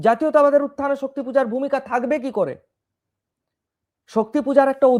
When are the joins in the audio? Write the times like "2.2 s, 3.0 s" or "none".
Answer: none